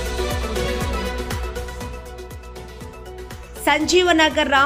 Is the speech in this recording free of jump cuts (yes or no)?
yes